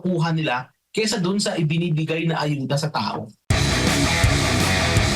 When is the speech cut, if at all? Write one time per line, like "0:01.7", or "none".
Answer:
0:03.3